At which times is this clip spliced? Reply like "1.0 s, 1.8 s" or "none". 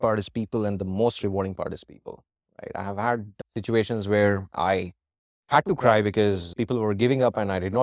none